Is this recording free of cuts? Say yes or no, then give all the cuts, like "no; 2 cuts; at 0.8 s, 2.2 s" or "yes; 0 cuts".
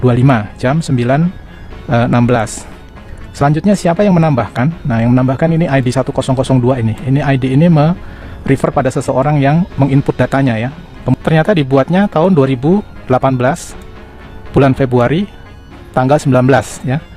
no; 1 cut; at 11.1 s